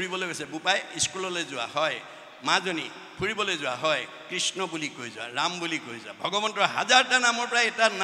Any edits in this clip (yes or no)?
no